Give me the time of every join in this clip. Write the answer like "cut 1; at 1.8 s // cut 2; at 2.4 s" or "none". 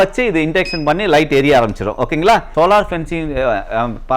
cut 1; at 2.5 s